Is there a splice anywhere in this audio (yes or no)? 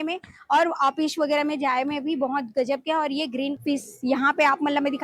yes